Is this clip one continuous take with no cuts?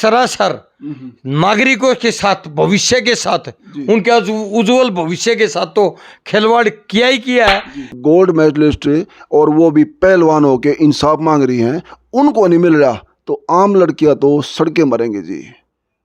no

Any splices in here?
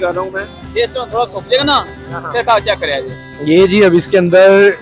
yes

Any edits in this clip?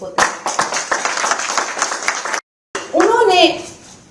yes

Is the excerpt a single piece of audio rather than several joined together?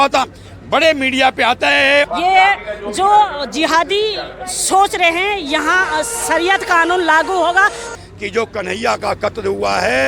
no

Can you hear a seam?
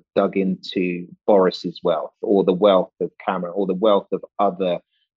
no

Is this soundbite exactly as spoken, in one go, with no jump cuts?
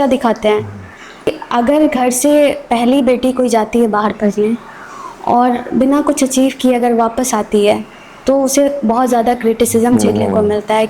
no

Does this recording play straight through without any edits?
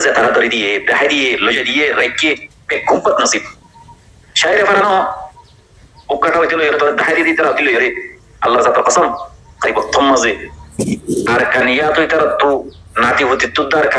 yes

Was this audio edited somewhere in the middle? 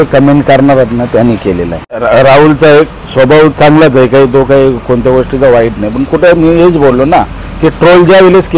yes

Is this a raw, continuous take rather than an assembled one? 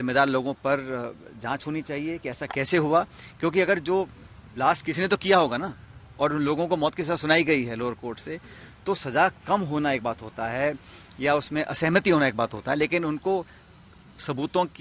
yes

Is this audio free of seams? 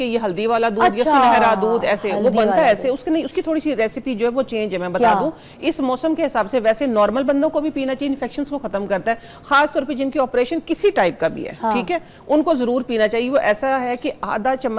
yes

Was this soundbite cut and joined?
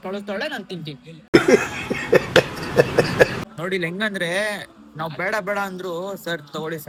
no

